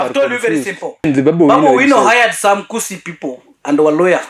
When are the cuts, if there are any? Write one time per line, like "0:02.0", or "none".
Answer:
0:01.1